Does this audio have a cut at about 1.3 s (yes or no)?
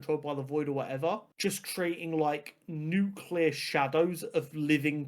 yes